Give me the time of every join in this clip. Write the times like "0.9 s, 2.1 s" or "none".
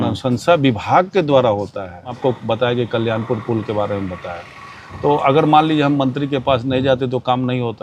2.2 s